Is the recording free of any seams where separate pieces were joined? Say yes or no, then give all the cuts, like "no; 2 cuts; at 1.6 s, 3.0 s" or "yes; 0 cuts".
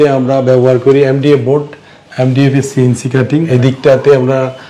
yes; 0 cuts